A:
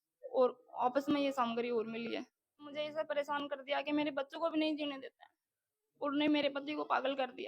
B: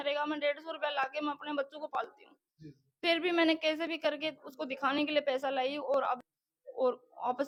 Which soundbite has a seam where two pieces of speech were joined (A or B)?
A